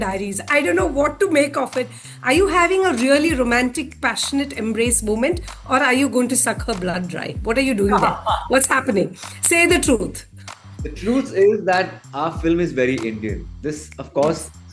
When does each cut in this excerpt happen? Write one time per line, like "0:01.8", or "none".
0:02.1